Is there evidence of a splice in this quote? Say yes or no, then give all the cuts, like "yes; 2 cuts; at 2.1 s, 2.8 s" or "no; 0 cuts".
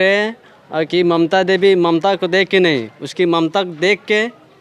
no; 0 cuts